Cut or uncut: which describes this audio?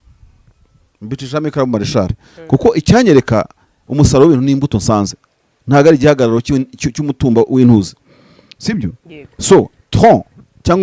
uncut